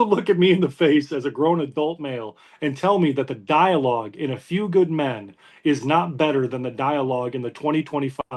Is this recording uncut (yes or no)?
yes